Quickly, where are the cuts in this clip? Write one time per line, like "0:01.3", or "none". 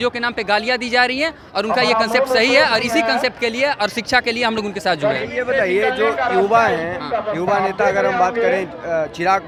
none